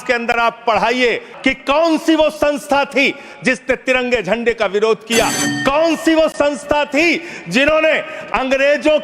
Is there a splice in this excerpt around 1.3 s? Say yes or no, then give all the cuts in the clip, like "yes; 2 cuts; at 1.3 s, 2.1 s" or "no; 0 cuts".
yes; 1 cut; at 1.3 s